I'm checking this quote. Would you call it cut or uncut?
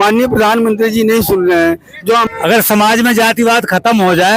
cut